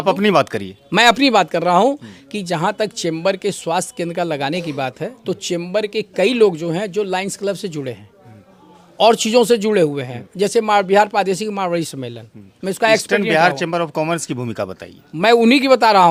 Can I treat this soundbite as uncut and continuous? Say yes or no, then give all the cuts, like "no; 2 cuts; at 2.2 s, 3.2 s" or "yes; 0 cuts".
yes; 0 cuts